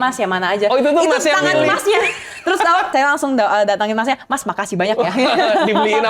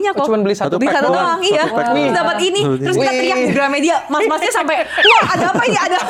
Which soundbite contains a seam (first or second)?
first